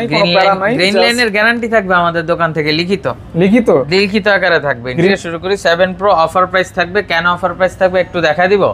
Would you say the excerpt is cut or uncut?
cut